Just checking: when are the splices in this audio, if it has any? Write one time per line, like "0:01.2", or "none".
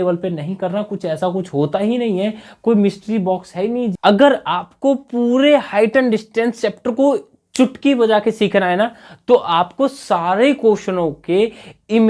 0:03.9